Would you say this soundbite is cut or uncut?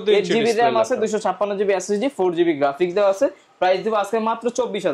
uncut